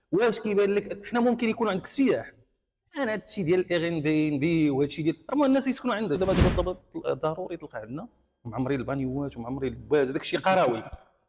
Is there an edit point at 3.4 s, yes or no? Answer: no